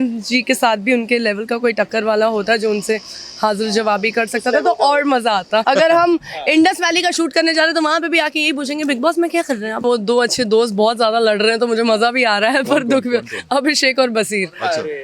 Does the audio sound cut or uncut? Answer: cut